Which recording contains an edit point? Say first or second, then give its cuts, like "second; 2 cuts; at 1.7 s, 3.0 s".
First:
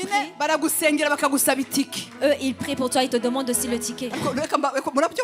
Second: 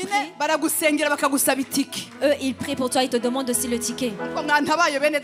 first; 1 cut; at 4.0 s